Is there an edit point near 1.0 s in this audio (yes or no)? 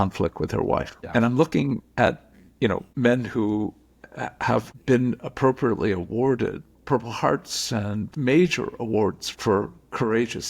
yes